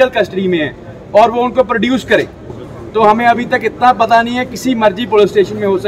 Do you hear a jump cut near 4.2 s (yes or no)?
no